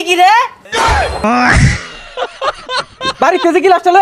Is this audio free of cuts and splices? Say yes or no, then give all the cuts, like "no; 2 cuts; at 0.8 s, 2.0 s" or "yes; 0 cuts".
no; 2 cuts; at 1.0 s, 3.0 s